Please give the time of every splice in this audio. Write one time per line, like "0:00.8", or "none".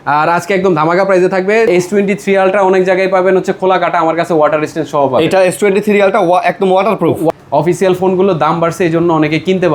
0:01.7
0:07.3